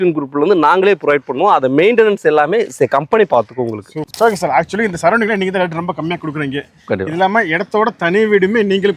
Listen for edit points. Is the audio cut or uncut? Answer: cut